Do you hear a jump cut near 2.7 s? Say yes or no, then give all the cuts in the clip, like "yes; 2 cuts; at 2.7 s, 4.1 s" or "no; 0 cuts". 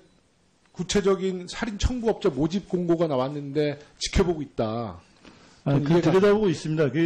no; 0 cuts